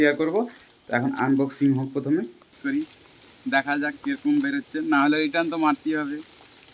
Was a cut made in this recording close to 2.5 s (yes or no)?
yes